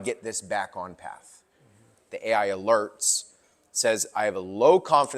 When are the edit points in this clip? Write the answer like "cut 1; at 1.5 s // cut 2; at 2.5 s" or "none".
cut 1; at 1.8 s